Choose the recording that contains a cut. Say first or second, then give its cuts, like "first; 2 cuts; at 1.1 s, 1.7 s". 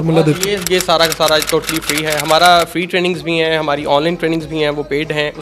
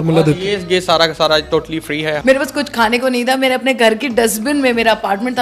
second; 1 cut; at 2.2 s